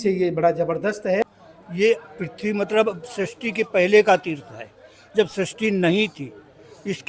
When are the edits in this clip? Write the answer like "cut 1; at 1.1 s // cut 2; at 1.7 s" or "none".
cut 1; at 1.2 s